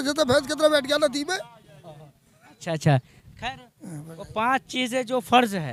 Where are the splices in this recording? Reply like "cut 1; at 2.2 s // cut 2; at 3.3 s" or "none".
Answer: none